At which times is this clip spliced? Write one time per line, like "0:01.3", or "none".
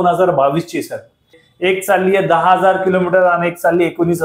0:01.4